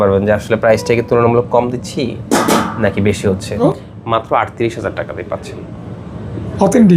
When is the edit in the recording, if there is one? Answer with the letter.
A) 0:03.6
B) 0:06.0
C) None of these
A